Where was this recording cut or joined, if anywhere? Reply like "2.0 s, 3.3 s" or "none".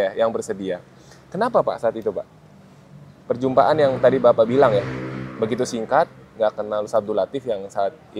none